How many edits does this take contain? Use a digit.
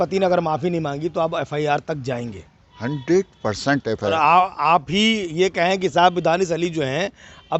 1